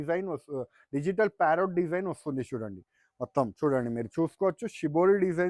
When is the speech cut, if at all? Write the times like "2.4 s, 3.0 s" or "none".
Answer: none